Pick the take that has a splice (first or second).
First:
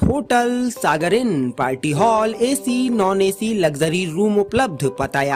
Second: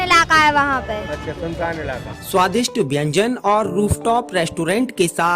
second